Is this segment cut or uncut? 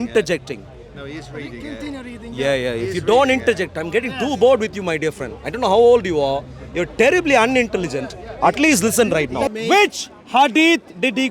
cut